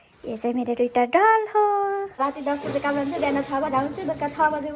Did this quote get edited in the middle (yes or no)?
yes